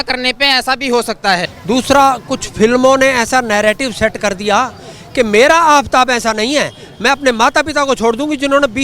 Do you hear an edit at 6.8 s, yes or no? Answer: no